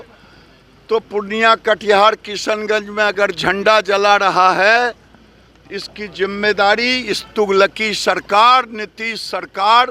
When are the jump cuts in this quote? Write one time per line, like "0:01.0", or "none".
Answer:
none